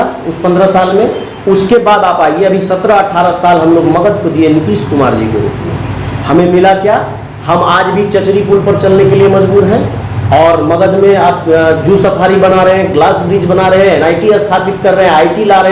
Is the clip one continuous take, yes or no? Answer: yes